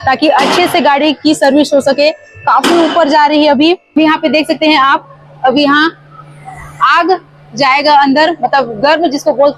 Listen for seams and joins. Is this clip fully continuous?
no; 1 cut; at 4.0 s

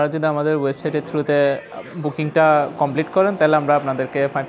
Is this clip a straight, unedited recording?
yes; 0 cuts

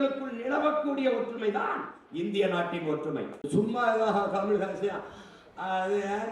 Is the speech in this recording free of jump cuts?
no; 1 cut; at 3.4 s

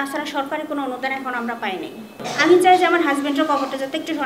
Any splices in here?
yes; 1 cut; at 2.1 s

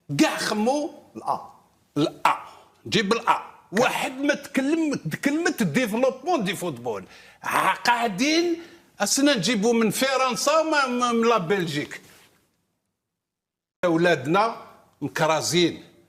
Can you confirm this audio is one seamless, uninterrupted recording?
no; 2 cuts; at 3.6 s, 13.8 s

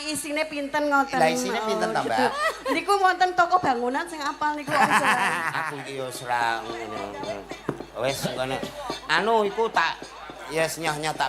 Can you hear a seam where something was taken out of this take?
yes; 1 cut; at 5.8 s

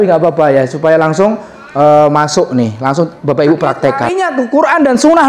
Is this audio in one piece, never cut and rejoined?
no; 1 cut; at 4.2 s

